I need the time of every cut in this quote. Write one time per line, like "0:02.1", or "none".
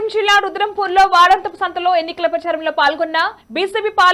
none